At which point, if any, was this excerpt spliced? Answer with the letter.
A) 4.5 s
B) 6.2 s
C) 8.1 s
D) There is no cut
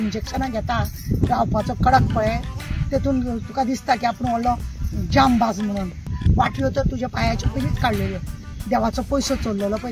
B